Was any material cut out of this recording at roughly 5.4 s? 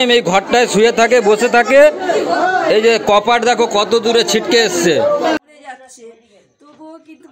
yes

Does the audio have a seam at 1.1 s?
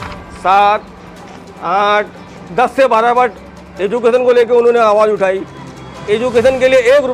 no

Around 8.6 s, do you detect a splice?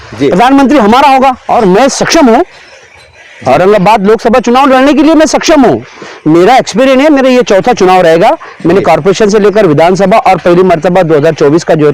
no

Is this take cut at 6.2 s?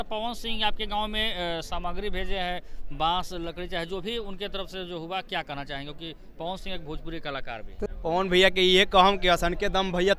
no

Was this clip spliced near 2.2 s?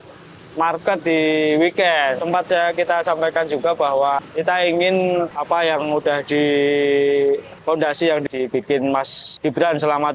yes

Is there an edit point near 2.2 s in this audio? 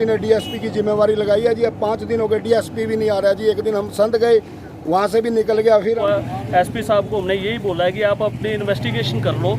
no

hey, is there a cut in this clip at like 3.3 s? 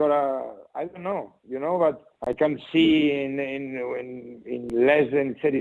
no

